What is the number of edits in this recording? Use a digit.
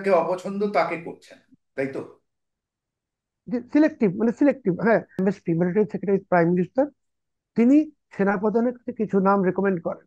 1